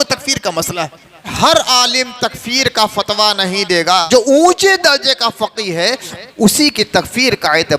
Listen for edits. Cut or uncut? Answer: cut